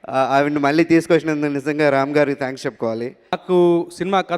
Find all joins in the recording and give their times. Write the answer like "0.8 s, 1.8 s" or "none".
3.4 s